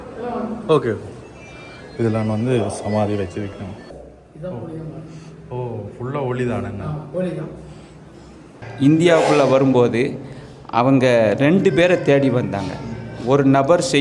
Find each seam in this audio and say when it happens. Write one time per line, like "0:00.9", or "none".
0:03.9
0:08.4